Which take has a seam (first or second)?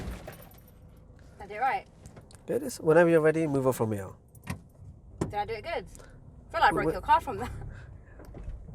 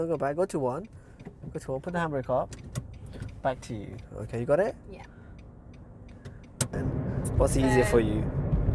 second